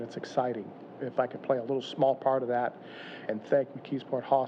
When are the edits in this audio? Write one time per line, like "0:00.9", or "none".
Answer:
0:01.0
0:03.3